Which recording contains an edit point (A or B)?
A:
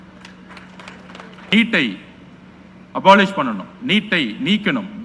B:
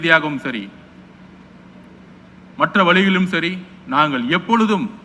A